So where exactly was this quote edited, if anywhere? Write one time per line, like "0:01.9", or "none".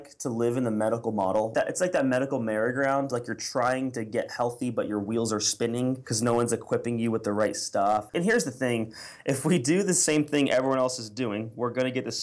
0:01.5
0:06.1
0:08.1